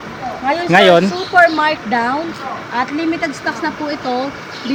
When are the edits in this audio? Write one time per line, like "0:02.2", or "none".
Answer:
none